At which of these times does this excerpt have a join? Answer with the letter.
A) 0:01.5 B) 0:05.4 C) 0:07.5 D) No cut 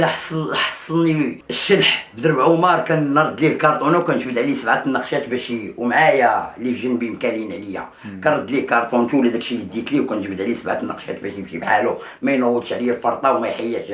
A